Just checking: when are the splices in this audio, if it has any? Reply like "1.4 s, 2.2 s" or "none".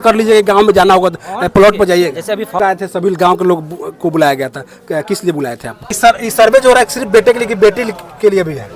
2.6 s, 5.9 s